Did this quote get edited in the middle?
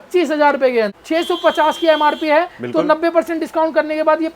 yes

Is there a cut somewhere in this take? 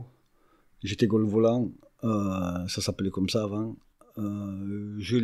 no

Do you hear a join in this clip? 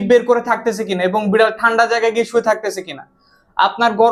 no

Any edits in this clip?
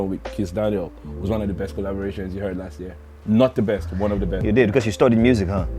yes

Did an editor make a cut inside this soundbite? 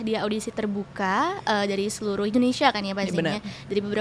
no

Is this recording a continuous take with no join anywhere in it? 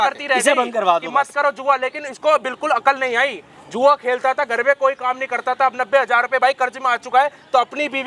yes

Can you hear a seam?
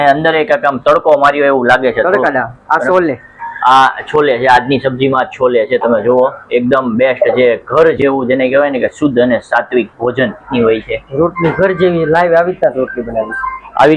yes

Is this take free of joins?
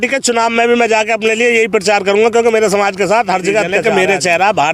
no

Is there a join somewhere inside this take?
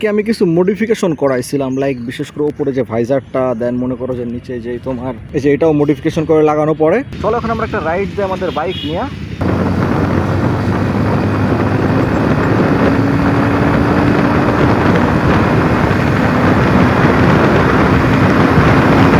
yes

